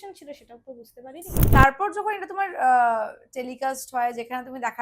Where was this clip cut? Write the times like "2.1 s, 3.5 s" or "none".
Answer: 1.4 s